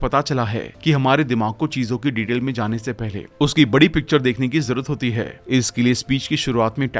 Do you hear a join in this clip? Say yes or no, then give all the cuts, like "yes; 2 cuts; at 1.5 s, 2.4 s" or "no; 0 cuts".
no; 0 cuts